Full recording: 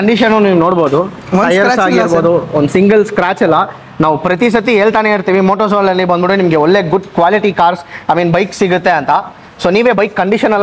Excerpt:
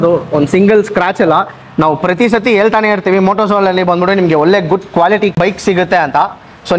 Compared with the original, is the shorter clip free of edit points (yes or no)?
no